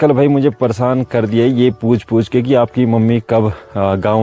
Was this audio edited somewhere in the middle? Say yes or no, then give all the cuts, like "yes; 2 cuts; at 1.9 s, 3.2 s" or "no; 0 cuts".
no; 0 cuts